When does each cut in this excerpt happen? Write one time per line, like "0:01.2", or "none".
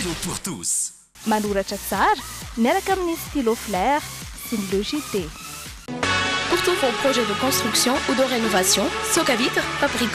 none